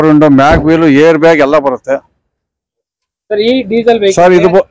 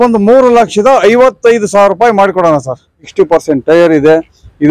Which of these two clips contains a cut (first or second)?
second